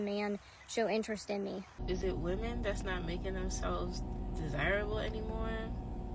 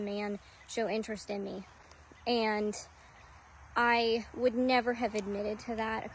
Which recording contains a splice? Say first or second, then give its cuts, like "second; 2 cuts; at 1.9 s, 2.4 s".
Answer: first; 1 cut; at 1.7 s